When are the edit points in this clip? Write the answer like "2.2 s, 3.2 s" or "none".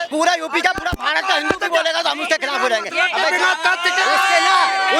none